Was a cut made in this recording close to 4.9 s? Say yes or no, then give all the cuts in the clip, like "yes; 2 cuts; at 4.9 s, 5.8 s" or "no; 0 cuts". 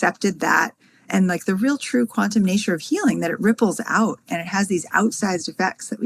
no; 0 cuts